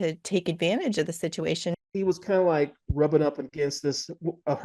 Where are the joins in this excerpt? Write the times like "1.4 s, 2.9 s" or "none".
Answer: 1.8 s